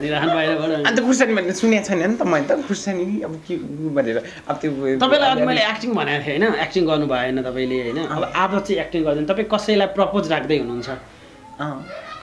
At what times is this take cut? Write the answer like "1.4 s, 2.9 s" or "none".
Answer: none